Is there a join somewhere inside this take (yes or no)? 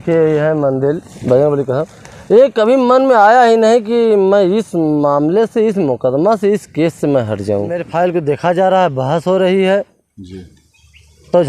yes